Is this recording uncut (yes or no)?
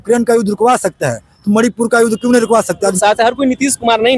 no